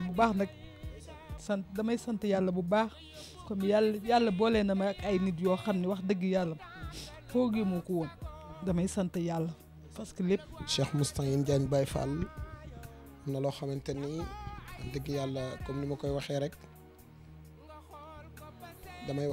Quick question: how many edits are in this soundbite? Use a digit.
3